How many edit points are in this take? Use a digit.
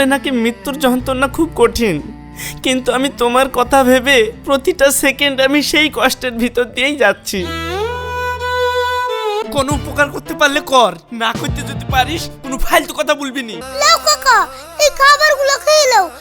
2